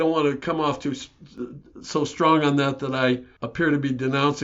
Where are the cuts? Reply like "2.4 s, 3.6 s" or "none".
3.4 s

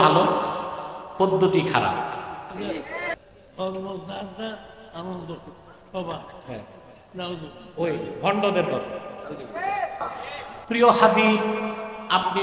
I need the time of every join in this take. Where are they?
3.1 s, 10.6 s

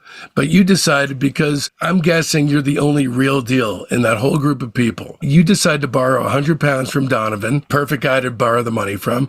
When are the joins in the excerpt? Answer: none

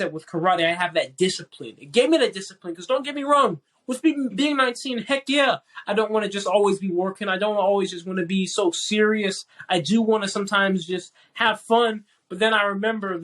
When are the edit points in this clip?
4.3 s

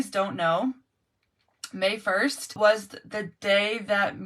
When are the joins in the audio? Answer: 2.5 s

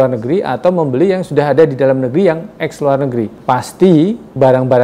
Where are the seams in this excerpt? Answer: 3.3 s

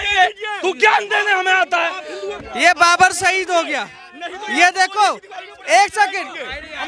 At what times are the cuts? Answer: 2.3 s

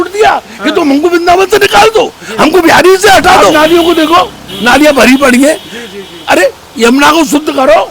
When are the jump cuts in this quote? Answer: 3.5 s

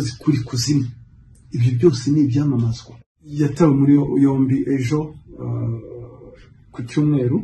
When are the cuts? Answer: none

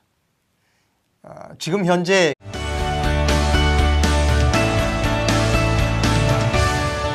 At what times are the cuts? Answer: none

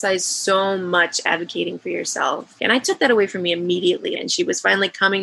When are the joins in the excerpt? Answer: 4.2 s

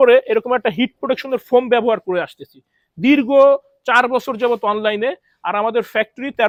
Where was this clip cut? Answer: none

